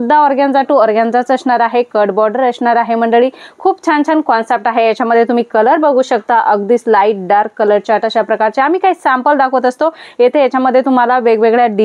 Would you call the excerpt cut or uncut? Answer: uncut